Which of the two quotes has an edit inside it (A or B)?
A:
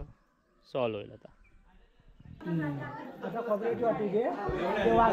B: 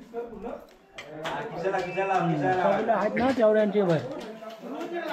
A